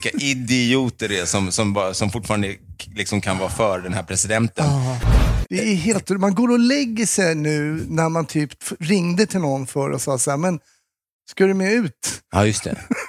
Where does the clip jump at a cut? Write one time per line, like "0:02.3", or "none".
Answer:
0:05.0